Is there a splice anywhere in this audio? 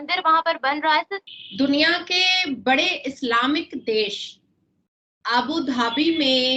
yes; 1 cut; at 1.2 s

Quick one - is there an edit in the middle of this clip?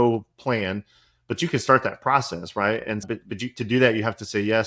yes; 1 cut; at 3.0 s

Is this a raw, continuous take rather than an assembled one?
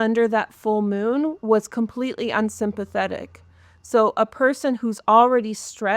yes; 0 cuts

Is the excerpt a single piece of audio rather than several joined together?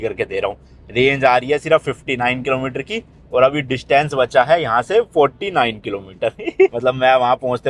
yes; 0 cuts

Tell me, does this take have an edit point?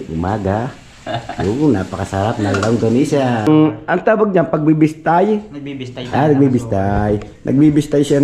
yes; 1 cut; at 3.5 s

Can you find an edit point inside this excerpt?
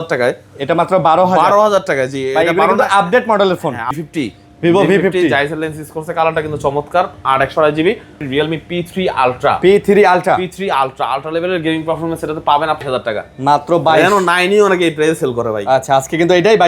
yes; 3 cuts; at 4.0 s, 8.2 s, 12.8 s

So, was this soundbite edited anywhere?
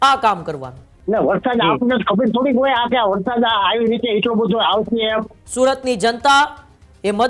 yes; 2 cuts; at 0.9 s, 5.4 s

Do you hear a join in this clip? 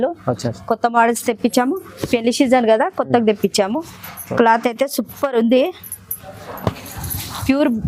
no; 0 cuts

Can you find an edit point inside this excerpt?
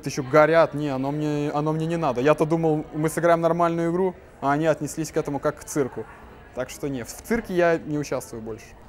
no; 0 cuts

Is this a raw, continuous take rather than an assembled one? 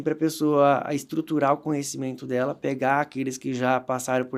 yes; 0 cuts

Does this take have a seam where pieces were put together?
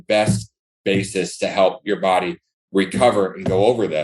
no; 0 cuts

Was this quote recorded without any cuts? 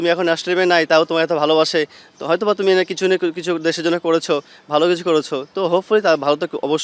yes; 0 cuts

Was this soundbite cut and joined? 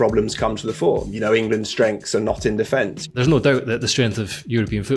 yes; 1 cut; at 3.1 s

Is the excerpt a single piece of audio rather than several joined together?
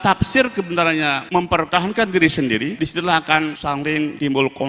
no; 3 cuts; at 1.5 s, 2.7 s, 3.9 s

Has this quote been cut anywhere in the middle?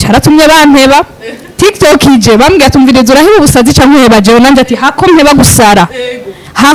no; 0 cuts

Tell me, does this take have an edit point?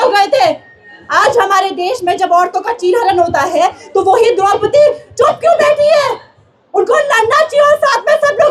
no; 0 cuts

